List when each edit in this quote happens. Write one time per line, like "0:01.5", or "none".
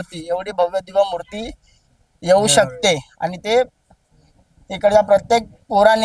none